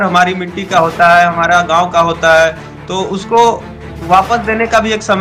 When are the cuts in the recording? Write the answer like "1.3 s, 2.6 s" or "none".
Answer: none